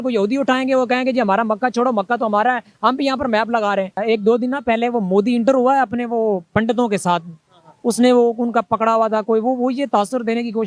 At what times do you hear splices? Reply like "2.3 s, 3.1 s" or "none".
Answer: 4.0 s